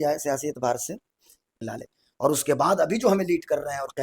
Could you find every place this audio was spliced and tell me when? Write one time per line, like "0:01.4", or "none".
0:01.6